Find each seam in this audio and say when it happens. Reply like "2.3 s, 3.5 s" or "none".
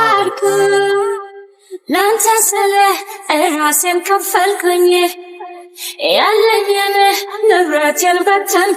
none

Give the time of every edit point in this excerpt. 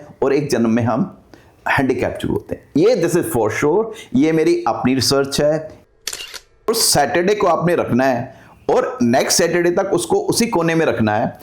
5.9 s

